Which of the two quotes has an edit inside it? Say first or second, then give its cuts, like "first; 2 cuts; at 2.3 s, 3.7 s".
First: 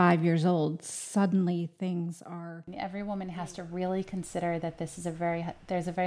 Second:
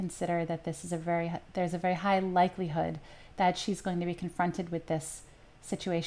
first; 1 cut; at 2.7 s